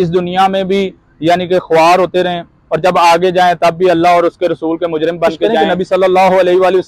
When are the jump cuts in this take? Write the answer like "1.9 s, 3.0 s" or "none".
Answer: 5.5 s